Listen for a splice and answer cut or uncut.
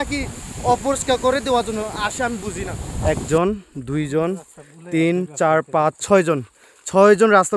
cut